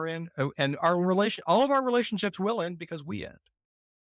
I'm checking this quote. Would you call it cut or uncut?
uncut